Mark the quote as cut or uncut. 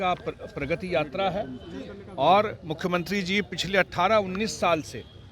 uncut